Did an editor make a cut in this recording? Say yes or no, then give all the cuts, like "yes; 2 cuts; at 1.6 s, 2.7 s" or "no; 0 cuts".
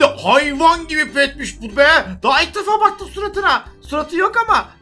no; 0 cuts